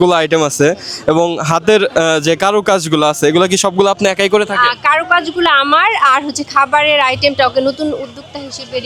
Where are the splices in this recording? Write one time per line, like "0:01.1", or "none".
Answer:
none